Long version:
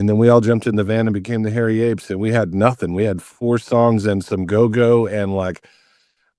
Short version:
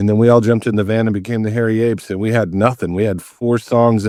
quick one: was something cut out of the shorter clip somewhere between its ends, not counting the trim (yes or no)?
no